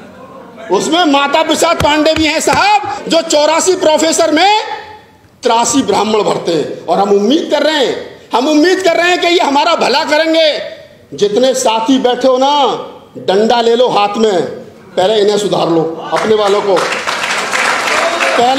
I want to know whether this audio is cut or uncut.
uncut